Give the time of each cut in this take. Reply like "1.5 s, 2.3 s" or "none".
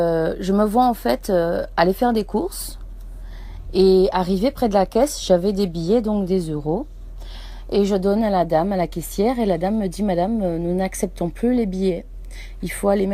10.5 s